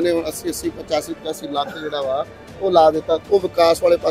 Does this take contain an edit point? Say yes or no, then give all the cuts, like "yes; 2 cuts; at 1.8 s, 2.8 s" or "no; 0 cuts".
yes; 1 cut; at 3.2 s